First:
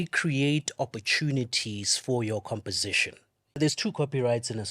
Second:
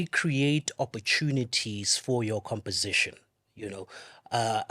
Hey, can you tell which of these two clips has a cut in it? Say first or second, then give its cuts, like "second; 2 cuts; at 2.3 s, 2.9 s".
first; 1 cut; at 3.6 s